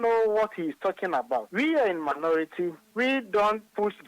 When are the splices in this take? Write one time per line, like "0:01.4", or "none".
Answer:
0:01.5